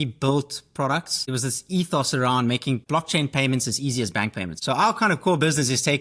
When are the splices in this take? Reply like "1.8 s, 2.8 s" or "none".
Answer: 1.2 s, 2.8 s, 4.5 s